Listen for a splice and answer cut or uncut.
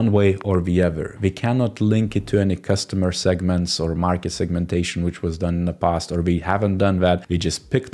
uncut